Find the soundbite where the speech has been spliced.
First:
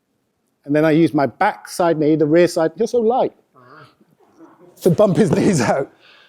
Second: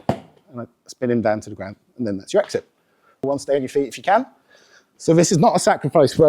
second; 1 cut; at 3.3 s

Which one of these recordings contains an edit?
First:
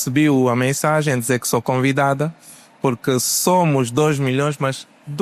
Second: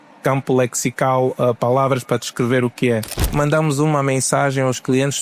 second; 1 cut; at 3.3 s

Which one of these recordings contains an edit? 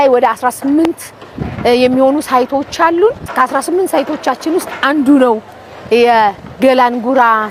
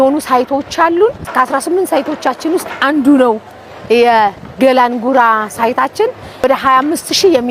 second; 1 cut; at 6.4 s

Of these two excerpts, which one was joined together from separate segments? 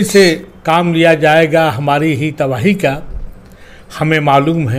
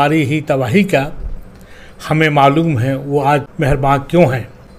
second; 1 cut; at 3.8 s

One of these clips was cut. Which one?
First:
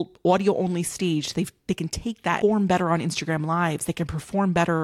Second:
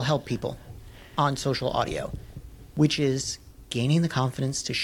first; 1 cut; at 2.4 s

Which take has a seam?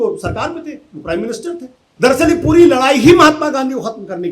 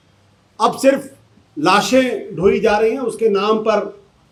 first; 1 cut; at 1.9 s

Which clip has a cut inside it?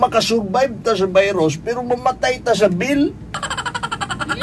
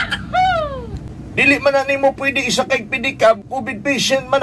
second; 2 cuts; at 1.0 s, 3.5 s

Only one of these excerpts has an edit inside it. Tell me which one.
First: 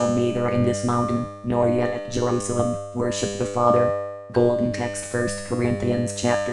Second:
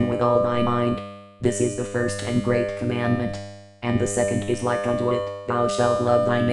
first; 2 cuts; at 4.1 s, 5.0 s

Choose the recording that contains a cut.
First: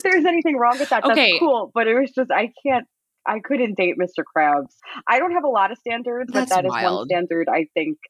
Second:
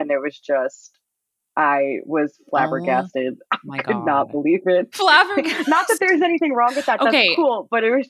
first; 1 cut; at 4.8 s

